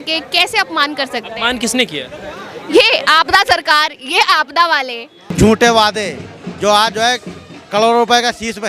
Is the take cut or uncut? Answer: cut